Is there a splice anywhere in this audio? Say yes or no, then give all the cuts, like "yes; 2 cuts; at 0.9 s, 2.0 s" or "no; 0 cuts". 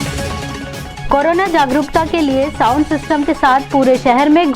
yes; 1 cut; at 0.9 s